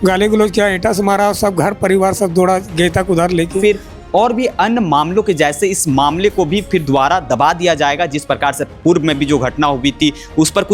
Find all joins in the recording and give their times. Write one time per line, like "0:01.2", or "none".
0:03.6